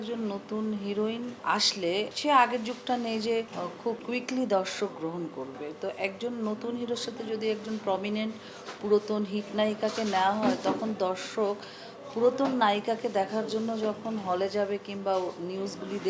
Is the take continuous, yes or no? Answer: no